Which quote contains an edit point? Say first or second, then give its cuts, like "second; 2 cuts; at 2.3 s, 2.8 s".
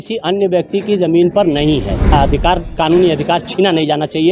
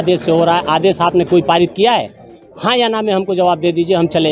first; 1 cut; at 2.1 s